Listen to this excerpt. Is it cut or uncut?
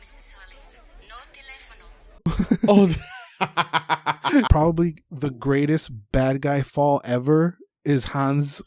cut